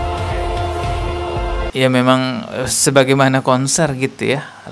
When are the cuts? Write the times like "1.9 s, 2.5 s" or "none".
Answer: 1.7 s